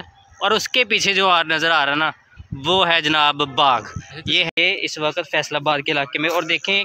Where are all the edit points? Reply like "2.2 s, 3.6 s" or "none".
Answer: 4.6 s